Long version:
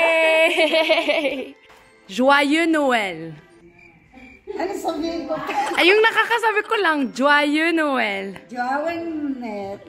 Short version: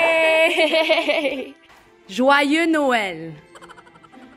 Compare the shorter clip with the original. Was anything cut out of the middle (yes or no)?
no